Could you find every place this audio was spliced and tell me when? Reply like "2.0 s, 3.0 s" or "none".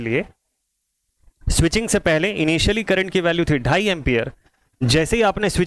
none